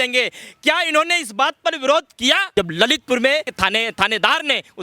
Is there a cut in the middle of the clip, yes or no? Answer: yes